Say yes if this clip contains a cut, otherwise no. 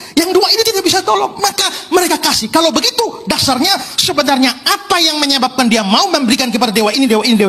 no